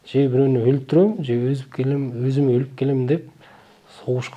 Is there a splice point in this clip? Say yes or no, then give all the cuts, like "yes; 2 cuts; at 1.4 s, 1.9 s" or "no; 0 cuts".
no; 0 cuts